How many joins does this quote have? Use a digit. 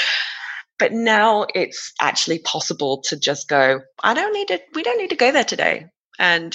1